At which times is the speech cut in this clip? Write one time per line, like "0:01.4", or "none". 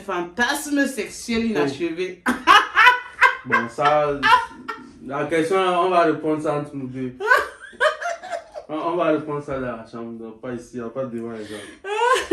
none